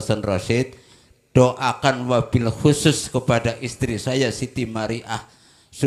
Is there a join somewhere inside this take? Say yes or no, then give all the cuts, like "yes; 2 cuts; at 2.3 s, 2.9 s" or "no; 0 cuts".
no; 0 cuts